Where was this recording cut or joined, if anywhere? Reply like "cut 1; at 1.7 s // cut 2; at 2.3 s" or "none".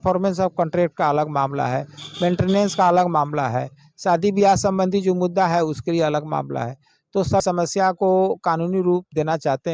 cut 1; at 7.4 s